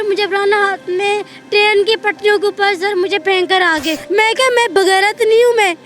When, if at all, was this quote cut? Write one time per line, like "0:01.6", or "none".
0:04.0